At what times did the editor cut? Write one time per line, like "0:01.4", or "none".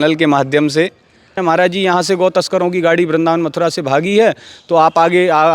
0:01.4